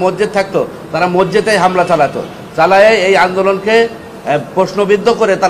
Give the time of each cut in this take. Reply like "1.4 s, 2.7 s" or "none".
none